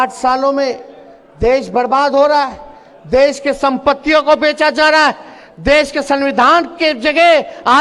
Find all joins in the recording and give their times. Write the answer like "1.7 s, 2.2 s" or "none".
none